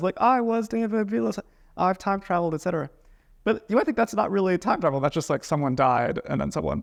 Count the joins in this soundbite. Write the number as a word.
zero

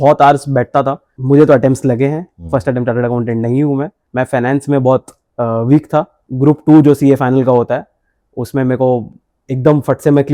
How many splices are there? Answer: three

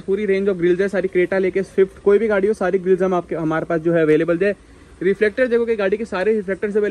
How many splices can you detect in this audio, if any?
zero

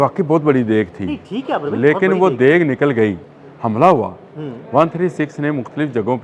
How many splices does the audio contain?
one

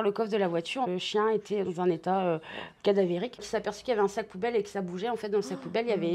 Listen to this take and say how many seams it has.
two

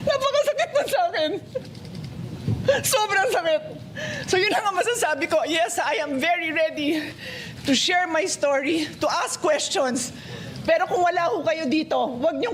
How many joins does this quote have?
zero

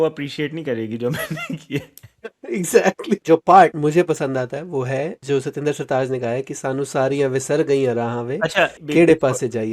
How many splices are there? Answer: four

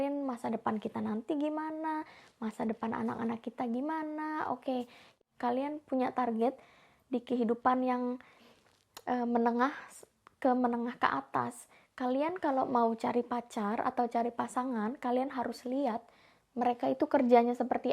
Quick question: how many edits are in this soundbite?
one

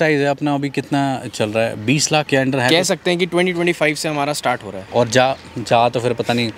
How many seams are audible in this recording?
two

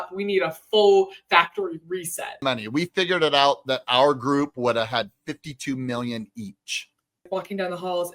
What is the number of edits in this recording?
two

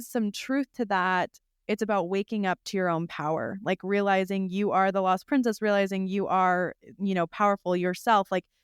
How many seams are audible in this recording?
one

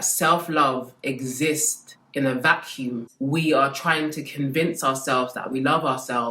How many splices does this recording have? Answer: one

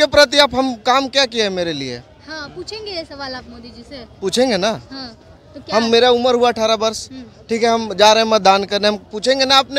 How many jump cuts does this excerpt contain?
zero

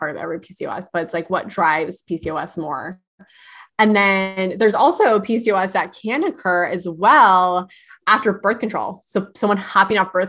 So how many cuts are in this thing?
zero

